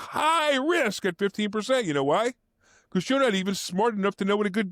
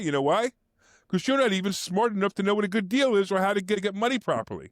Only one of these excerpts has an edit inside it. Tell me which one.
second; 1 cut; at 3.8 s

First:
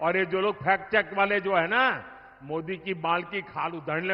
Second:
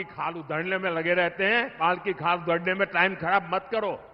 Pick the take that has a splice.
second; 1 cut; at 1.8 s

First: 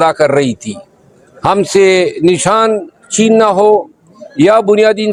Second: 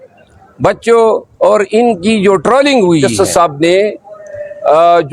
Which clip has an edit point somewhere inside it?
second; 1 cut; at 3.1 s

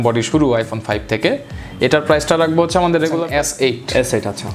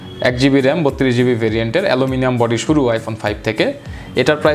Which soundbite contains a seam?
first; 1 cut; at 3.2 s

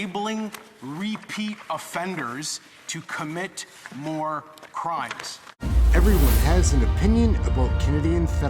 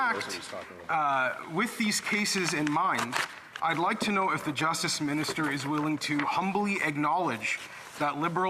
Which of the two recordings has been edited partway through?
first; 1 cut; at 5.6 s

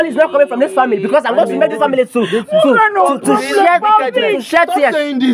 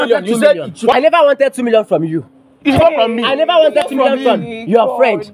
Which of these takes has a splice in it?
second; 1 cut; at 0.9 s

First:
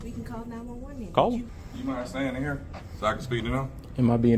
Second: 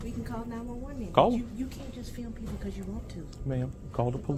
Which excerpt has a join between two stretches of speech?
first; 1 cut; at 1.5 s

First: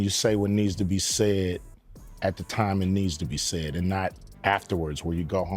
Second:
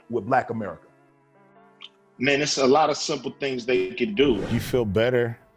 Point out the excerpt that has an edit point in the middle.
second; 1 cut; at 4.4 s

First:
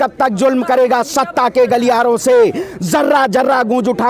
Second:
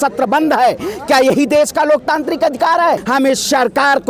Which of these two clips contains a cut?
second; 1 cut; at 3.0 s

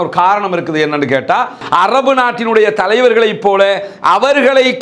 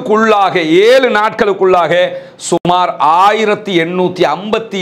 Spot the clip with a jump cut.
first; 1 cut; at 1.6 s

